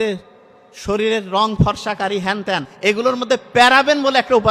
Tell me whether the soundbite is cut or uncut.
cut